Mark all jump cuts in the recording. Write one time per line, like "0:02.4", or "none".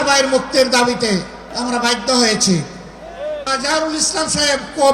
0:01.5
0:03.5